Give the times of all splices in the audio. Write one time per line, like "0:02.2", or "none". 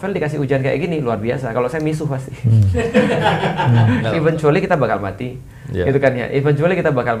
0:04.0